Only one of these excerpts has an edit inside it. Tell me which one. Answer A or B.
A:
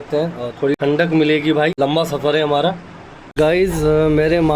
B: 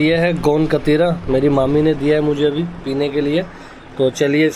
A